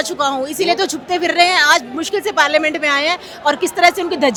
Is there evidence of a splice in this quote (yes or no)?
no